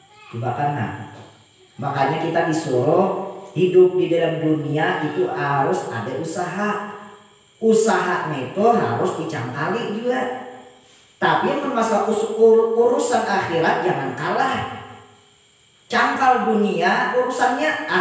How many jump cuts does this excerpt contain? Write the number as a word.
zero